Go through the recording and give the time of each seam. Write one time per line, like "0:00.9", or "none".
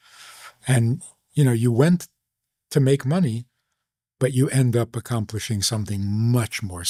none